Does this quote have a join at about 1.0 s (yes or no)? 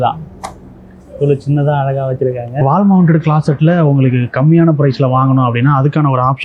no